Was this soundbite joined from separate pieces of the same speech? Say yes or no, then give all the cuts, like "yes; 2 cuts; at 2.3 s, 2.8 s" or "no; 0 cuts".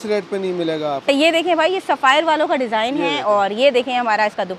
yes; 1 cut; at 1.2 s